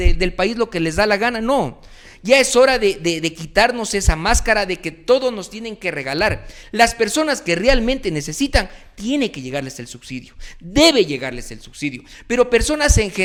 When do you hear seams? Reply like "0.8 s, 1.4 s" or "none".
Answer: none